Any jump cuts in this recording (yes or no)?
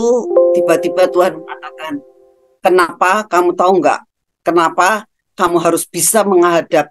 no